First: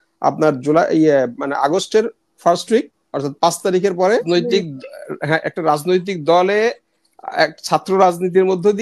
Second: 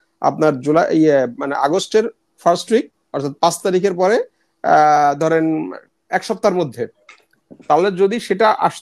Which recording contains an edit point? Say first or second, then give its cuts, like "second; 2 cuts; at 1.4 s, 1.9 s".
first; 1 cut; at 4.2 s